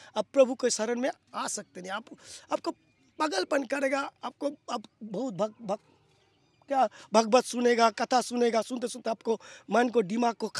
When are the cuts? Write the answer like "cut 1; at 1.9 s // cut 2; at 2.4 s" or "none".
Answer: none